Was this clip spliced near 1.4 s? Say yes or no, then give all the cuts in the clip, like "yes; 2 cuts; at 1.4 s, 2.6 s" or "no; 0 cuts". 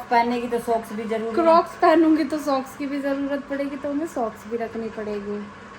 no; 0 cuts